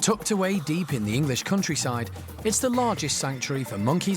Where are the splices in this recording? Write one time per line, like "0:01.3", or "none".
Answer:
none